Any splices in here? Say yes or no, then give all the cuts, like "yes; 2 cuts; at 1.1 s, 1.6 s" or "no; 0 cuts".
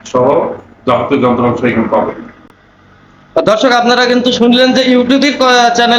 no; 0 cuts